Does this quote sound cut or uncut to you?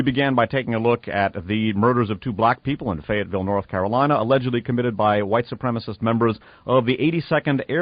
cut